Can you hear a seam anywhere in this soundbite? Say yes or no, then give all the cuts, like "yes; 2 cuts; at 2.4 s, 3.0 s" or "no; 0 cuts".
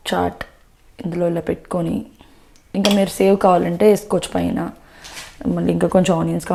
no; 0 cuts